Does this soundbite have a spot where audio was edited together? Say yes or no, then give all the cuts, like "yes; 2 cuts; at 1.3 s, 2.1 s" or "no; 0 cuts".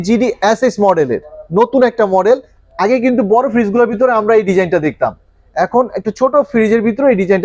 no; 0 cuts